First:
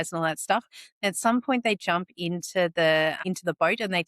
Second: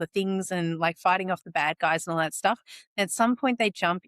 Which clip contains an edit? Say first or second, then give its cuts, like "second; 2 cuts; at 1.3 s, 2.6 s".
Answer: first; 1 cut; at 3.2 s